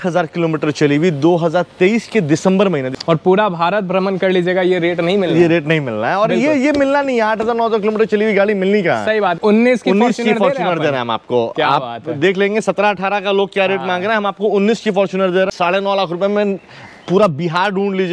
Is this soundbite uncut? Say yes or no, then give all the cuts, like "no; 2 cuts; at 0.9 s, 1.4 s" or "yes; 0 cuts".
no; 3 cuts; at 2.9 s, 9.4 s, 15.5 s